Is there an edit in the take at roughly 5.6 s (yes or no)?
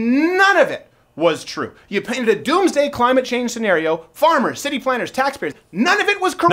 yes